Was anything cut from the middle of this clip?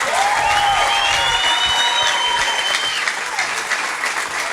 no; 0 cuts

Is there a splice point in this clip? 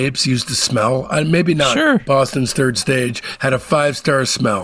yes; 1 cut; at 2.0 s

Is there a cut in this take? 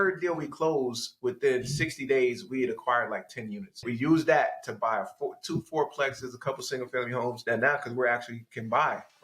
yes; 2 cuts; at 3.8 s, 7.4 s

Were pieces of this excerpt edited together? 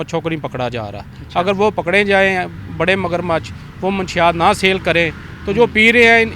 no; 0 cuts

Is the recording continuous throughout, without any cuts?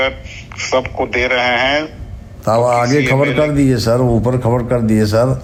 yes; 0 cuts

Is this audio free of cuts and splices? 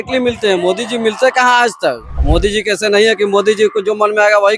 no; 1 cut; at 2.1 s

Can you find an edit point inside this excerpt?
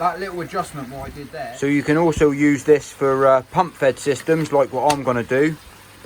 yes; 1 cut; at 1.2 s

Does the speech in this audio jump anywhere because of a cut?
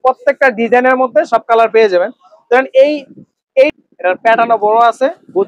yes; 1 cut; at 3.7 s

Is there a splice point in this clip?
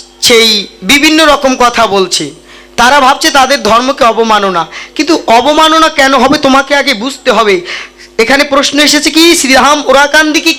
no; 0 cuts

